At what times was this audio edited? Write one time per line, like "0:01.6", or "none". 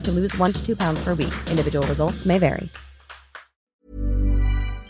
0:03.7

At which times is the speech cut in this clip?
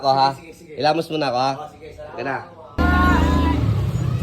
0:02.7

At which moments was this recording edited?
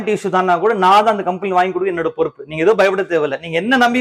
none

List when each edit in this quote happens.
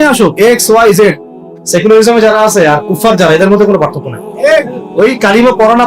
0:01.5

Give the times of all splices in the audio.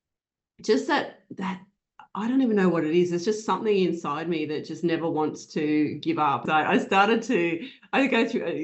0:06.4

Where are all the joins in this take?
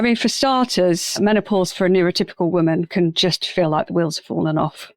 0:01.2

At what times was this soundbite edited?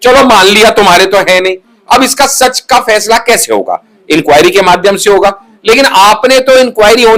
none

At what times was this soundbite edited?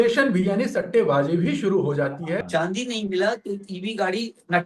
0:02.5

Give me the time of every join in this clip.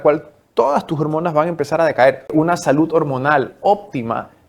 0:02.2

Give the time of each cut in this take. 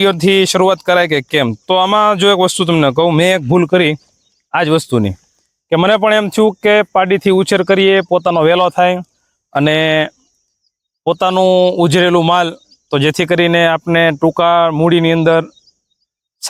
none

